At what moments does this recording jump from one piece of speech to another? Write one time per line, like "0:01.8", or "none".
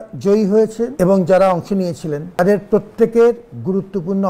0:00.9
0:02.4